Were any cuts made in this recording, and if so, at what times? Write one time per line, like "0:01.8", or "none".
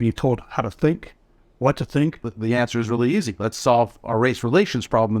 0:02.3